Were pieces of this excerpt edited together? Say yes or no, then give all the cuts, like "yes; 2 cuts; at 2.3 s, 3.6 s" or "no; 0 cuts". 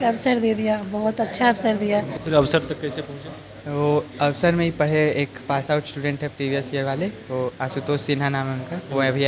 yes; 1 cut; at 2.1 s